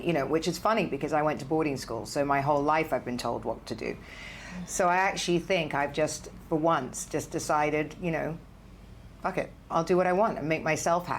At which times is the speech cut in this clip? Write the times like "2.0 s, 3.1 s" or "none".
9.7 s